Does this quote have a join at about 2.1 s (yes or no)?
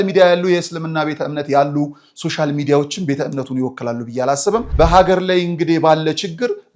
no